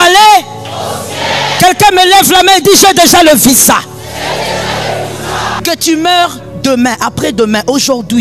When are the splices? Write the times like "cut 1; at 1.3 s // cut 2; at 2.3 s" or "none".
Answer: cut 1; at 5.6 s